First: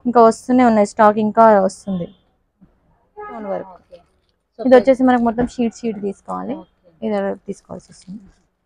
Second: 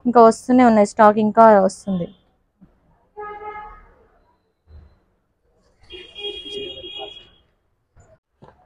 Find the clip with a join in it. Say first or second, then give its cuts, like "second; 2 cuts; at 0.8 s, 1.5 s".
first; 1 cut; at 3.4 s